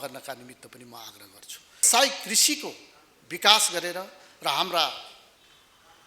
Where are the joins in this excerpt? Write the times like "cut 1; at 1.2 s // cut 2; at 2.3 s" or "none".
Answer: cut 1; at 1.9 s